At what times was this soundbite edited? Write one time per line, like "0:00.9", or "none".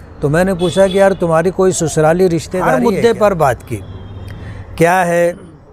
0:02.7